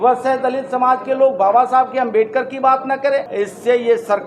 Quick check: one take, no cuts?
no; 1 cut; at 3.4 s

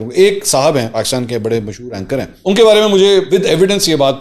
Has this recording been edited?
yes; 3 cuts; at 0.9 s, 2.3 s, 3.3 s

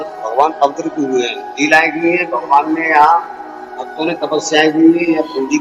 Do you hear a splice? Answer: no; 0 cuts

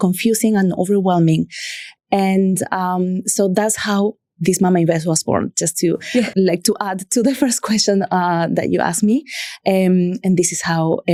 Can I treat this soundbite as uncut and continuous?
yes; 0 cuts

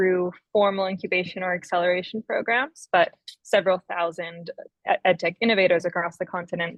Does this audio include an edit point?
no; 0 cuts

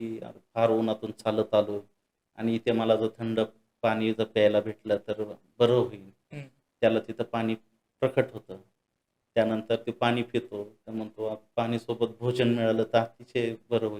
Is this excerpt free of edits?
yes; 0 cuts

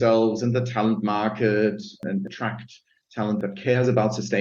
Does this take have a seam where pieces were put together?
yes; 2 cuts; at 2.0 s, 3.4 s

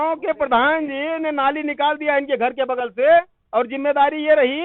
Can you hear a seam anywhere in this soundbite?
no; 0 cuts

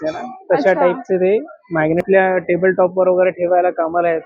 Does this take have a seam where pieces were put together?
yes; 1 cut; at 2.0 s

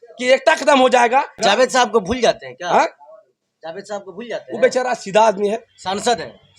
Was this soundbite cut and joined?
yes; 1 cut; at 1.4 s

